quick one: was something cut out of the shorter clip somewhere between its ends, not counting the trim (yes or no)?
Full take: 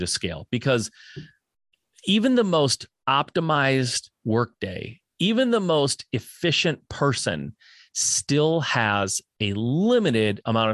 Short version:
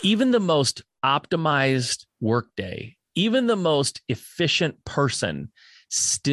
no